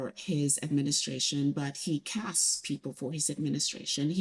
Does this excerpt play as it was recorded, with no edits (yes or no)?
yes